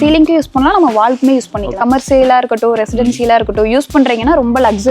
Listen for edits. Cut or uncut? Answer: cut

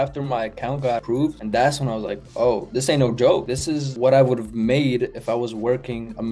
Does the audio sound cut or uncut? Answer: uncut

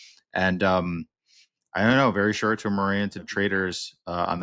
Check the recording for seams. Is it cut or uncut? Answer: cut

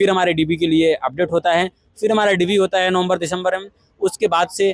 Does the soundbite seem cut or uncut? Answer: uncut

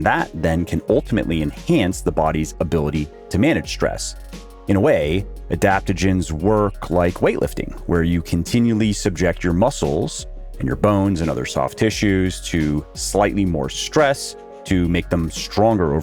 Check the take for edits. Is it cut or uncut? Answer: uncut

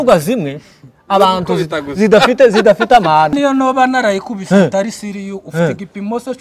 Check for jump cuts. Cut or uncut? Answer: cut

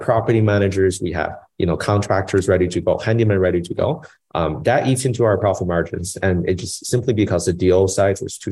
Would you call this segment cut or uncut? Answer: uncut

